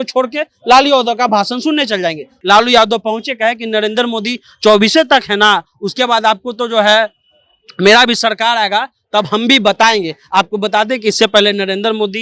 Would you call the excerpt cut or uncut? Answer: cut